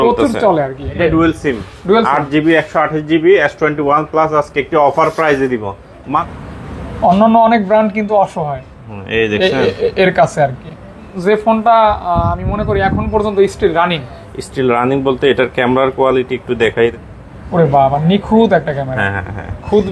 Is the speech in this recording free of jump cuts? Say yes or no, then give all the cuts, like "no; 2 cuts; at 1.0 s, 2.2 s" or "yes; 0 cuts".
no; 4 cuts; at 0.9 s, 6.2 s, 11.1 s, 16.9 s